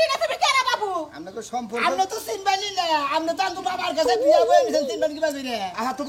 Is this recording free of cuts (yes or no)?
yes